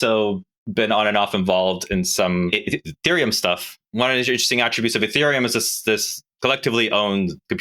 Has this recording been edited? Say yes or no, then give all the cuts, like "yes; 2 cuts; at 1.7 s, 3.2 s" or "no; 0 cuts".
yes; 3 cuts; at 2.5 s, 3.8 s, 6.2 s